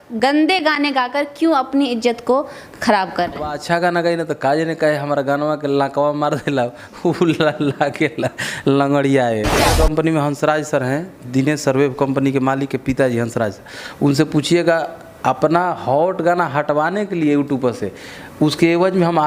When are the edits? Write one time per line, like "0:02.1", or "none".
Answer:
0:03.6
0:09.7